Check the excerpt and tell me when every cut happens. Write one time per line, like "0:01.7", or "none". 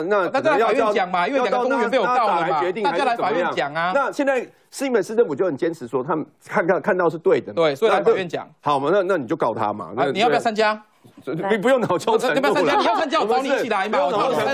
none